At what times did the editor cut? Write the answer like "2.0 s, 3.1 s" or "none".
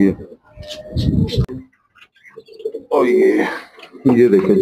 1.4 s

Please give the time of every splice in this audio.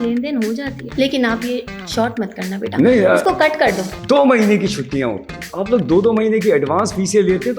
3.9 s, 5.4 s

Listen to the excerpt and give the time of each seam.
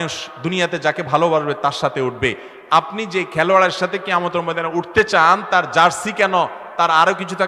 none

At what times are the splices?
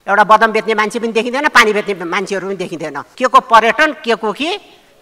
3.0 s

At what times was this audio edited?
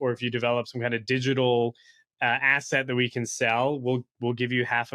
none

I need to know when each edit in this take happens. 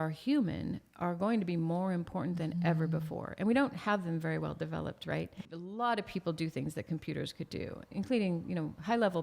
5.5 s, 7.9 s

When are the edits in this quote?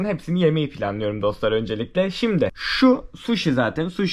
none

